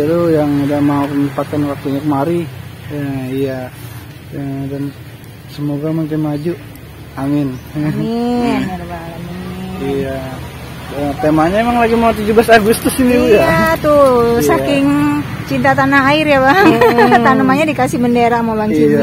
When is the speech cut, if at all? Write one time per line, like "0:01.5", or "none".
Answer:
none